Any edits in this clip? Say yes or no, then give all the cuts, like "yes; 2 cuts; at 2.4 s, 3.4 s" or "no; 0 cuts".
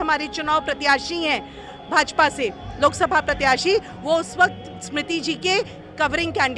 no; 0 cuts